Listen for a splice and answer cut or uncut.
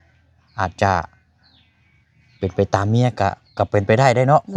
uncut